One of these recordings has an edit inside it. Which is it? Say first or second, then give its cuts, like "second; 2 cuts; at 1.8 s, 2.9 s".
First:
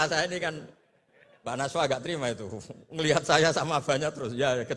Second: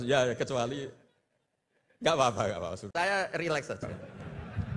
second; 2 cuts; at 2.8 s, 3.8 s